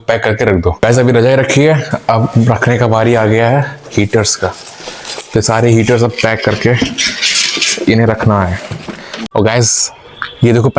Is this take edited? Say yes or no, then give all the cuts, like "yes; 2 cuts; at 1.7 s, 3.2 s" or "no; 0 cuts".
yes; 2 cuts; at 0.8 s, 9.1 s